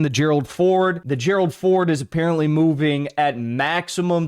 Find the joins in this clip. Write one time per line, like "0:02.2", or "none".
0:01.1